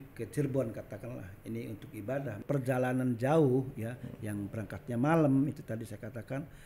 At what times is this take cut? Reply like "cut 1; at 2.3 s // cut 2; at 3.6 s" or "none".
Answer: cut 1; at 2.4 s